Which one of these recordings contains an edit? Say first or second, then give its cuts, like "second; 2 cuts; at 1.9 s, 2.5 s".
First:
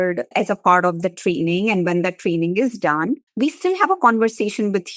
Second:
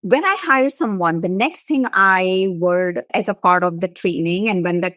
first; 1 cut; at 3.3 s